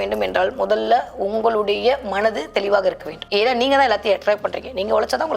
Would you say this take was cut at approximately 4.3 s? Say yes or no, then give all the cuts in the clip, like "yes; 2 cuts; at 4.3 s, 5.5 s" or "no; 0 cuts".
no; 1 cut; at 3.1 s